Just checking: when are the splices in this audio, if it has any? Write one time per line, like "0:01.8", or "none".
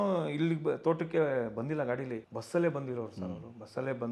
0:02.3